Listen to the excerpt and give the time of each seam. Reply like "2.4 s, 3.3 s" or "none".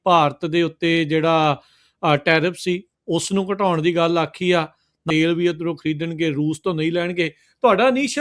5.0 s